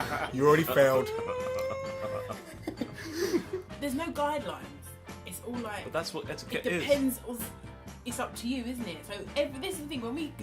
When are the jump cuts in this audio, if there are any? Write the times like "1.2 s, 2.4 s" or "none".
2.2 s

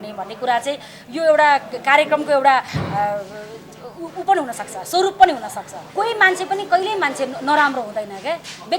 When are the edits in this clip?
5.8 s

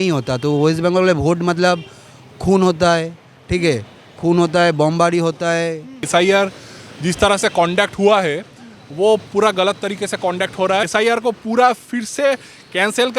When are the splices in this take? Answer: 6.0 s, 10.9 s

